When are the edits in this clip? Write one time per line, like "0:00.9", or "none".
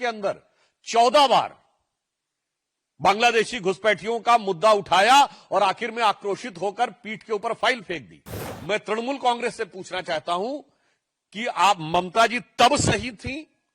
none